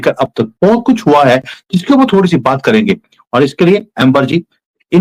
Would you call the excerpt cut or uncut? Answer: uncut